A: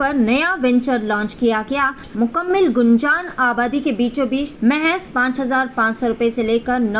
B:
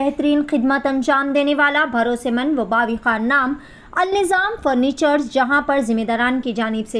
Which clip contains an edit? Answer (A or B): A